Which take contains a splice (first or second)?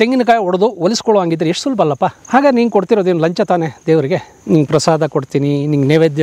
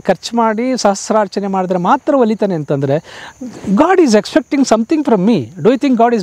first